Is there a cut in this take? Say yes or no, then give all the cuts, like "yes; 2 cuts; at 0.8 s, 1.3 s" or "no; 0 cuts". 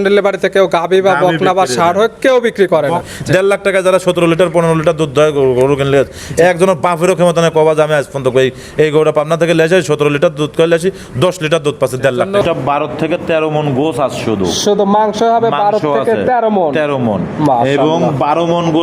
yes; 2 cuts; at 3.0 s, 12.4 s